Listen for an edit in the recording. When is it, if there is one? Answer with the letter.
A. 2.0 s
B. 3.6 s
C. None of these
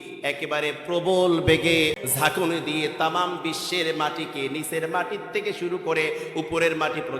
A